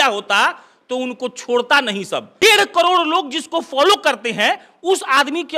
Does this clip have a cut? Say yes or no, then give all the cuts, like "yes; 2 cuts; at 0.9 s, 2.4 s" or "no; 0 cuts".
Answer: yes; 1 cut; at 2.4 s